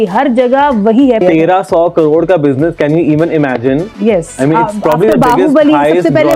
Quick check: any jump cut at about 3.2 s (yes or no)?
no